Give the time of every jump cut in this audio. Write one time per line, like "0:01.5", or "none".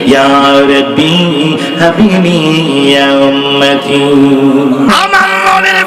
0:04.9